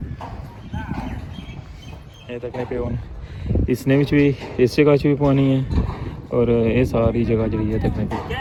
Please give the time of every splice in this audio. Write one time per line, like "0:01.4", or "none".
none

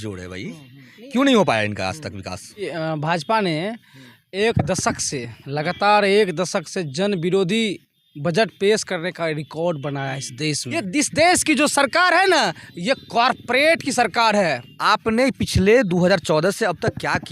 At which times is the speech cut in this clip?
0:02.6
0:10.8
0:14.7

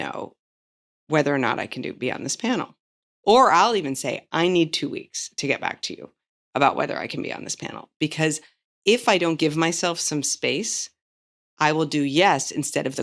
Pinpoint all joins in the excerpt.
none

